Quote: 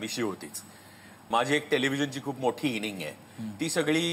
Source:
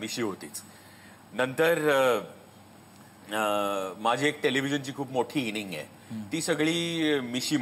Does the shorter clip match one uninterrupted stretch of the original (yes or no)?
no